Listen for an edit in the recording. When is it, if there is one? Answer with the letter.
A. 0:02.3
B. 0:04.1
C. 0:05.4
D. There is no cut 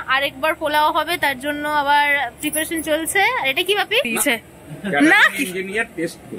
B